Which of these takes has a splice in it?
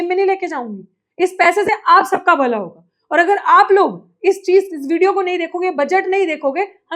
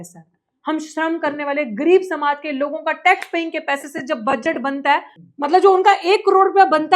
second; 1 cut; at 5.2 s

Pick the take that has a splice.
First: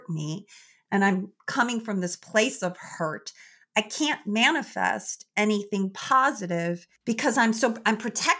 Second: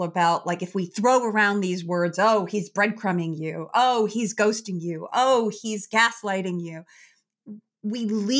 first; 1 cut; at 6.9 s

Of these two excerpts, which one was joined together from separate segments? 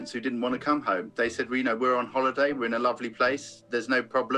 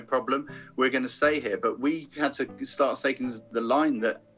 second; 1 cut; at 2.1 s

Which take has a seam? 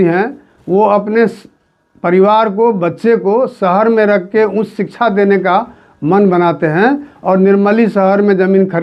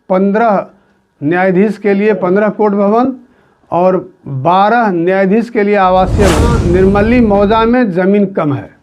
second; 1 cut; at 6.6 s

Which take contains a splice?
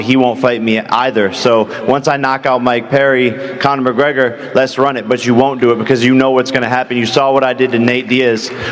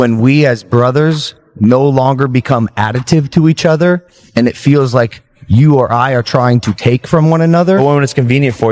first; 1 cut; at 1.7 s

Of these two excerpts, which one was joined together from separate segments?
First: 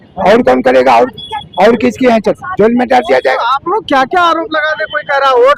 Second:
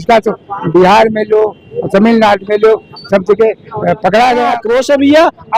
second; 1 cut; at 4.6 s

